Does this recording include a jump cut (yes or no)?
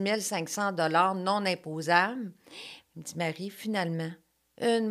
no